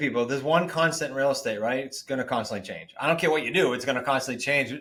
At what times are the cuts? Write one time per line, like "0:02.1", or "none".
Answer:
none